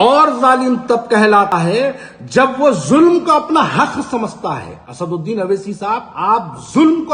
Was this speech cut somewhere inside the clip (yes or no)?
yes